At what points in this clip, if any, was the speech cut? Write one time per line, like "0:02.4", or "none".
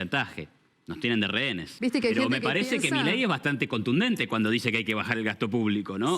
0:01.6